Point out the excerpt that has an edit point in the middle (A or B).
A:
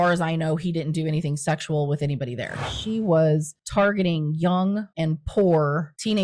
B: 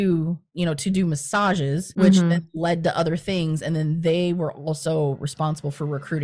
A